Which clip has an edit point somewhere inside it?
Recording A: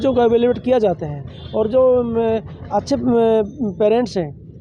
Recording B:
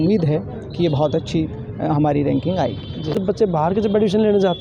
B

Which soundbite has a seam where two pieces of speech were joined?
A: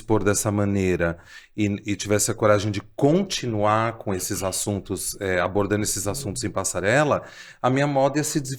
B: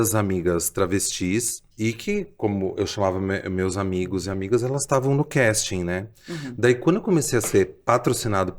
B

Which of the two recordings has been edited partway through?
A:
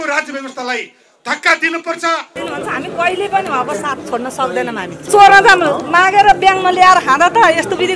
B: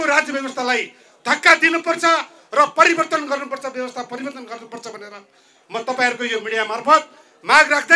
A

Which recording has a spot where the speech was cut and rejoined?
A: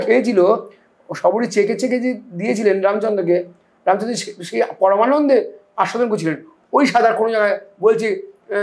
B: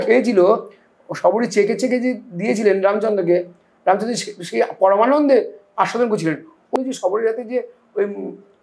B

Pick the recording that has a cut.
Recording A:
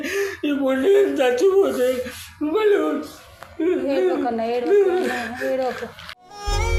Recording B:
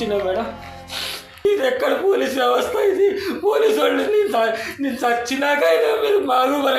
B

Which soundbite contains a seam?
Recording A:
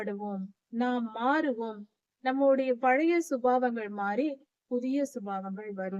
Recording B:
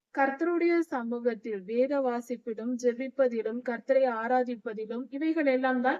B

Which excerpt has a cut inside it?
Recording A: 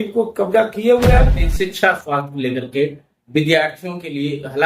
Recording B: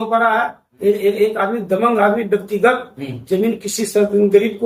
A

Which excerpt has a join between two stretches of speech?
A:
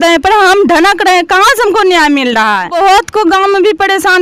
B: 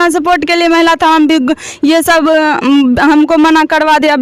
A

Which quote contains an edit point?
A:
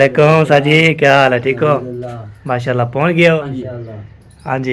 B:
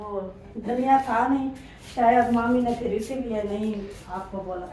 A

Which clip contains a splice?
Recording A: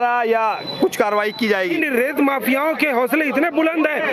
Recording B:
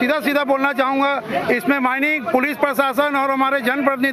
A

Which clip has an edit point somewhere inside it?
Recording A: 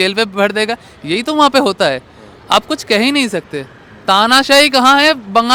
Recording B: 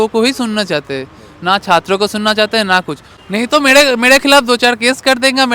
B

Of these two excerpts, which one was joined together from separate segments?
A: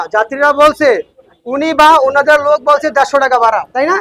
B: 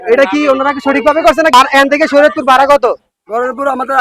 B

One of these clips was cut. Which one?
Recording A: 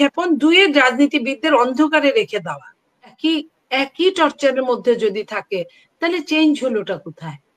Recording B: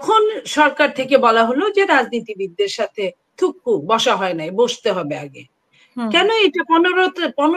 A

